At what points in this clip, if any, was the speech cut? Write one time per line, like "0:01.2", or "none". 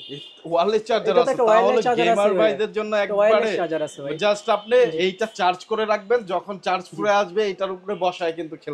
none